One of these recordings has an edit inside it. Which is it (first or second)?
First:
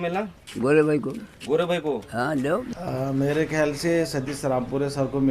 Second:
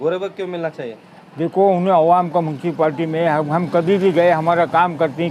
first